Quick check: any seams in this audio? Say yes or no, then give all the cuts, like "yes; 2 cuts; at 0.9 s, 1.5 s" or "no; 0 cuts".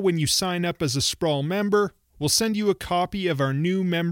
no; 0 cuts